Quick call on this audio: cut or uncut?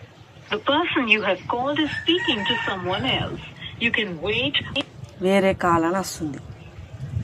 uncut